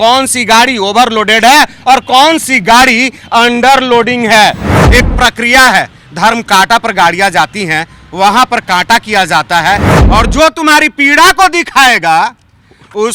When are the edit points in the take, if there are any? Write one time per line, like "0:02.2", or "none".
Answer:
0:04.8
0:09.9

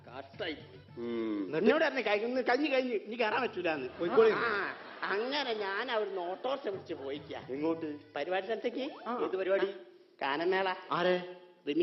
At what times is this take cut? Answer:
none

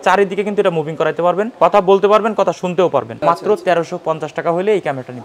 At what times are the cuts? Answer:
0:01.5
0:03.1

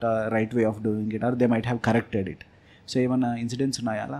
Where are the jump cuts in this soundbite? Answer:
none

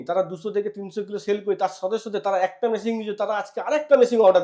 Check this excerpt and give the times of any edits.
none

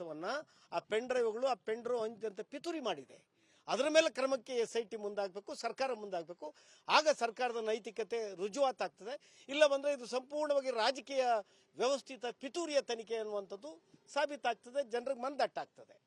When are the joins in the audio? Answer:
none

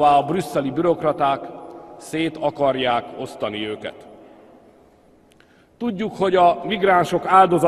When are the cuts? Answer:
0:03.4

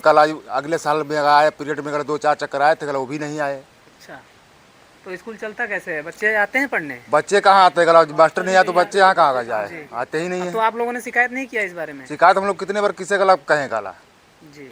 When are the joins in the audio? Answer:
none

